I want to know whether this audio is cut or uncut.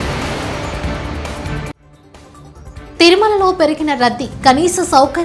cut